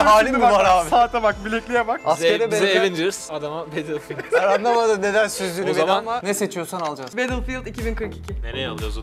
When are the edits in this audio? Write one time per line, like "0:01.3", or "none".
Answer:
0:06.2